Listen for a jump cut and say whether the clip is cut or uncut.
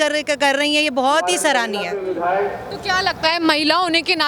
uncut